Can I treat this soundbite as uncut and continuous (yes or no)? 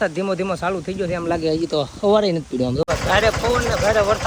no